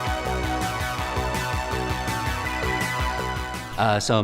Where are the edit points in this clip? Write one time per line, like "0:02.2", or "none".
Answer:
0:03.2